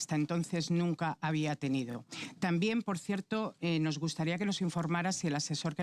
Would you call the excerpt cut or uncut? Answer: uncut